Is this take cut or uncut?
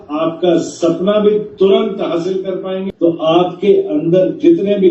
cut